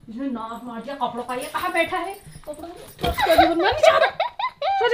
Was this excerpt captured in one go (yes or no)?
yes